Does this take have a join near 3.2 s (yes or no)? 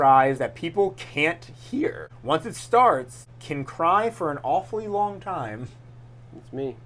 yes